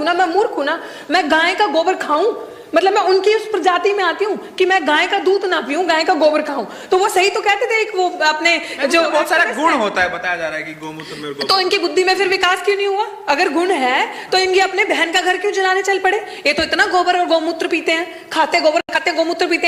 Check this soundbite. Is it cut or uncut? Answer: uncut